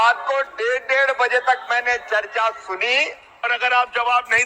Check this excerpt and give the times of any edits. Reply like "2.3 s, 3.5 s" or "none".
3.5 s